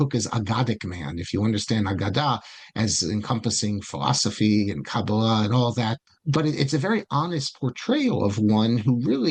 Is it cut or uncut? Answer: uncut